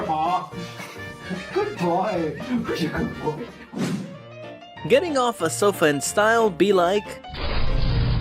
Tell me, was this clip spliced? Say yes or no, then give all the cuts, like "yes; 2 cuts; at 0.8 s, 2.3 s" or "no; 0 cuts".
no; 0 cuts